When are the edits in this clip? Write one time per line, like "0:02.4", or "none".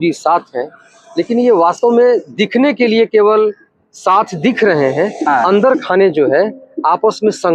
none